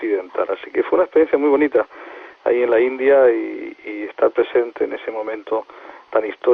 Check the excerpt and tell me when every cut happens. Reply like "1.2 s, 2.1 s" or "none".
none